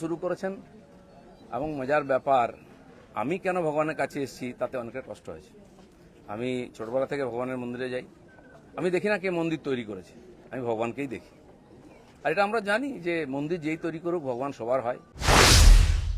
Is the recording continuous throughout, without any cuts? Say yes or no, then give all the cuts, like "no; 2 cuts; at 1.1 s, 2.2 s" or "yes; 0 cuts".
no; 1 cut; at 15.1 s